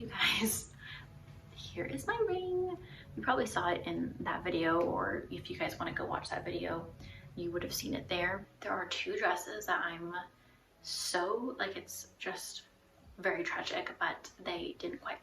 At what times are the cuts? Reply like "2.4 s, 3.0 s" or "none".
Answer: 8.4 s

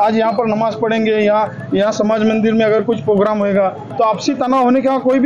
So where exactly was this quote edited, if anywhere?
none

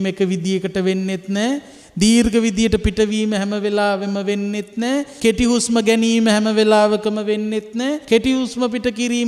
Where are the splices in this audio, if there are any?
5.1 s, 8.0 s

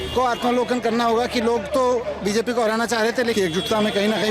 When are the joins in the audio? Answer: 3.3 s

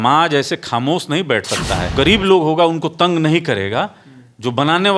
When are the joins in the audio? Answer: 1.9 s

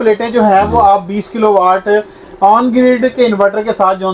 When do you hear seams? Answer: none

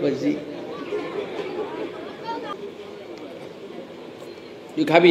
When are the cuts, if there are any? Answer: 2.5 s

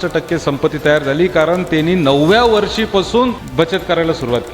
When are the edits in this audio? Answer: 3.4 s

